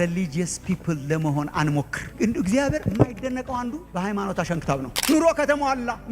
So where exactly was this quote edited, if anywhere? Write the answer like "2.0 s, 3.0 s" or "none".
5.0 s